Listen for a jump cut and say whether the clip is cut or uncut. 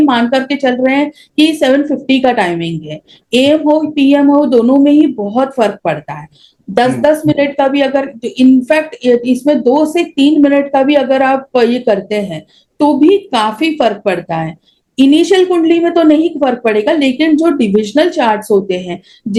uncut